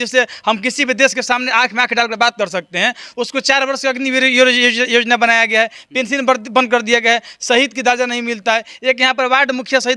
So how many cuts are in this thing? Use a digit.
0